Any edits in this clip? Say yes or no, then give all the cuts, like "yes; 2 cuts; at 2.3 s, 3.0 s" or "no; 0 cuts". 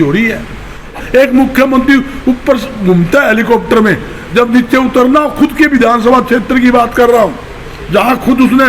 yes; 1 cut; at 1.0 s